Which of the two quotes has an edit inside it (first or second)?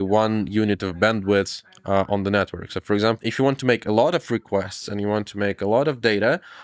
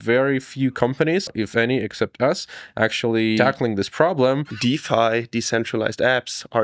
second